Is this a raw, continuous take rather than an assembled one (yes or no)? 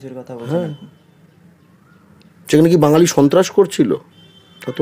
yes